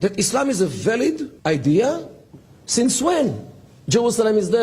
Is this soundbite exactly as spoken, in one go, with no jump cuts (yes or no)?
no